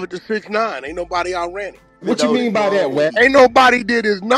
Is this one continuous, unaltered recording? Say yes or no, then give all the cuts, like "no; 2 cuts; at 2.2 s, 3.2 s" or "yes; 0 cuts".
no; 2 cuts; at 2.0 s, 3.1 s